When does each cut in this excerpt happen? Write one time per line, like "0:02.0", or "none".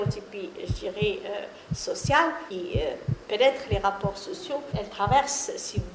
0:02.5
0:04.8

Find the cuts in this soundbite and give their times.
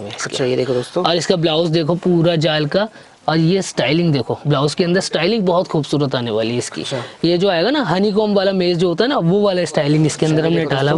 none

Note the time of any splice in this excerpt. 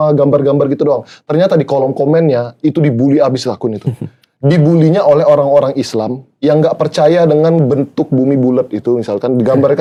none

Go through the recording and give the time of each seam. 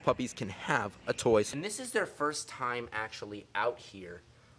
0:01.5

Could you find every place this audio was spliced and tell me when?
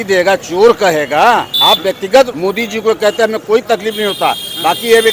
0:01.5
0:02.3

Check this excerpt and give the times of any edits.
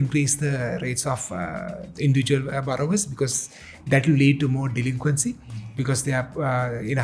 none

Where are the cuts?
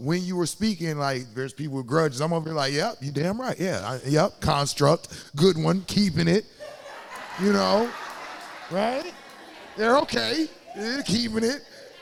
none

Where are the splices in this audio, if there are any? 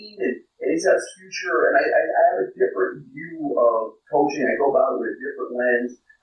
0:04.0

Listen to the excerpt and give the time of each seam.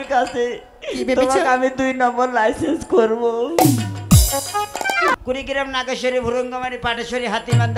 0:05.1

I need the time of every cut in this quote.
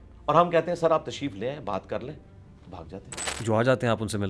0:03.2

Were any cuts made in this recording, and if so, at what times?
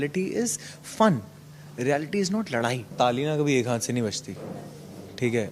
0:02.9

